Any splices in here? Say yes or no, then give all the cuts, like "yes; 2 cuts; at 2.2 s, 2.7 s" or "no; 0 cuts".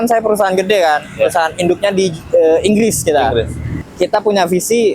yes; 1 cut; at 3.8 s